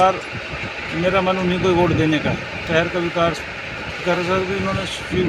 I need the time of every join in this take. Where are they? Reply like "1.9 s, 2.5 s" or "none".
none